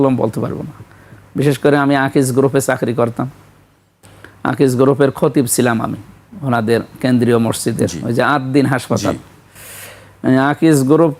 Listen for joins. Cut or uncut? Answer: uncut